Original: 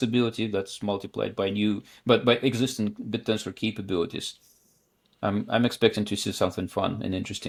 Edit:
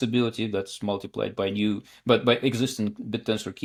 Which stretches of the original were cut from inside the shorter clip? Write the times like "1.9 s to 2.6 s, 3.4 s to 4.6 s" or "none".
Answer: none